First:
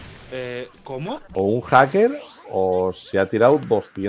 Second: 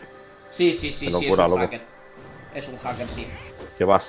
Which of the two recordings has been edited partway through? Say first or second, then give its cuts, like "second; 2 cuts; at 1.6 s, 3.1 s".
first; 1 cut; at 1.3 s